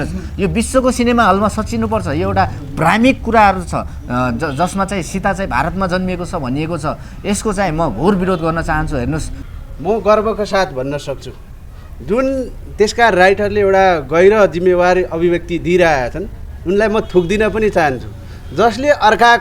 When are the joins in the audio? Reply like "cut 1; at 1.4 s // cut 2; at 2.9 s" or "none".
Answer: cut 1; at 9.4 s